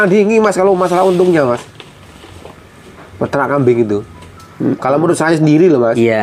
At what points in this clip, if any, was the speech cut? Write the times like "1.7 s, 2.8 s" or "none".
none